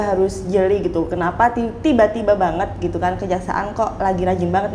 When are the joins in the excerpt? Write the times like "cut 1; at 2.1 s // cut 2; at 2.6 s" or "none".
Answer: none